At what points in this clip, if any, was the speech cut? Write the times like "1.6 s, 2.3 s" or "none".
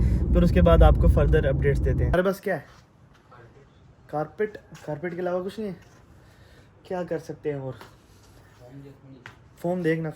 2.1 s